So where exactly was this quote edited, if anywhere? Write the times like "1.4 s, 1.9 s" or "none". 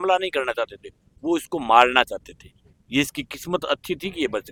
none

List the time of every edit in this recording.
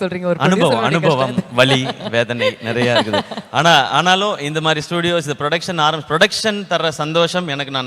none

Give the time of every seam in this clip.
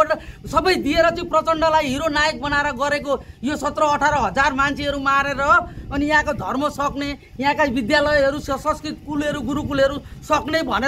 none

